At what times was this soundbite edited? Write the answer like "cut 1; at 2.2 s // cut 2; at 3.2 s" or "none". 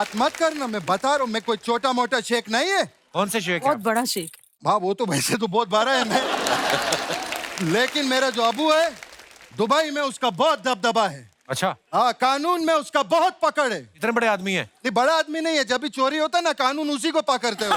none